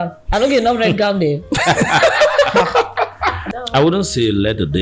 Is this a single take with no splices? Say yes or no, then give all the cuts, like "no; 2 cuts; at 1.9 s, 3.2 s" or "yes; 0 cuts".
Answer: no; 1 cut; at 3.4 s